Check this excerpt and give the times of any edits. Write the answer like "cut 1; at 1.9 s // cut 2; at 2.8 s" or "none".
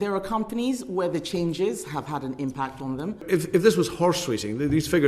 cut 1; at 3.2 s